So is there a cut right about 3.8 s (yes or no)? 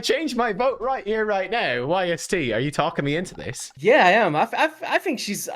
yes